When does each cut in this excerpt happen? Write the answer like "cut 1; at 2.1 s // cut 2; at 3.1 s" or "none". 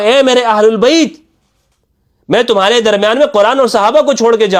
none